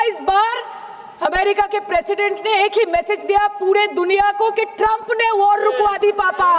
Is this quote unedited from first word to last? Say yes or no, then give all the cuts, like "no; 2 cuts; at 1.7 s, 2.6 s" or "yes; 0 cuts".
yes; 0 cuts